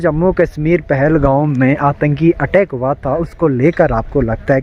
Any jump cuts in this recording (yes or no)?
no